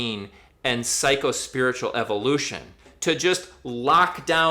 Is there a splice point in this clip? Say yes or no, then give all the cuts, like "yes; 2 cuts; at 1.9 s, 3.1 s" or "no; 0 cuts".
yes; 1 cut; at 2.9 s